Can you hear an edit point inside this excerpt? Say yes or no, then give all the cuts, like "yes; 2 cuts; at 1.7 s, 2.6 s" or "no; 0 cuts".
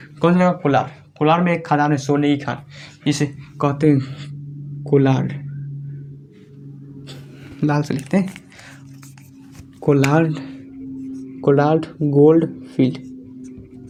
no; 0 cuts